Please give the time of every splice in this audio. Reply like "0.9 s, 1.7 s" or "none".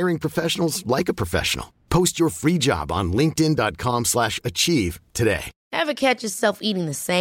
5.6 s